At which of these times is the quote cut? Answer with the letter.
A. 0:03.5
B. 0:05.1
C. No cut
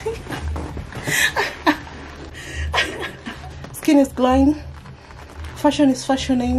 A